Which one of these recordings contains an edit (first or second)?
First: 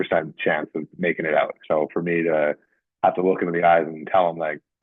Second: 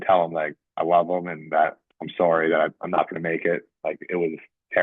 first